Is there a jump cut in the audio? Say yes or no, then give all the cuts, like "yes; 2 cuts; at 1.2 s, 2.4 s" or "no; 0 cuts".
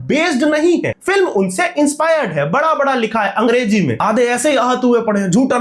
yes; 2 cuts; at 1.0 s, 4.0 s